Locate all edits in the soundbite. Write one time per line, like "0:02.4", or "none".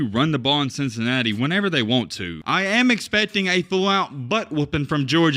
0:02.3